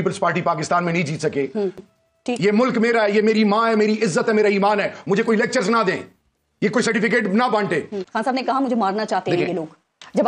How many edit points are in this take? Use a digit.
2